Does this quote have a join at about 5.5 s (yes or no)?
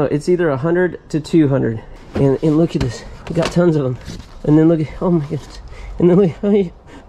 no